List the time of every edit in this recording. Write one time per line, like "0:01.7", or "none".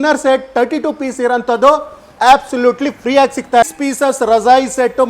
0:03.6